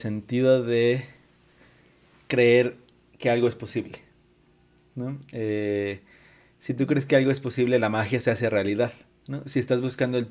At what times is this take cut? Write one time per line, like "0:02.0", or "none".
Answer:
none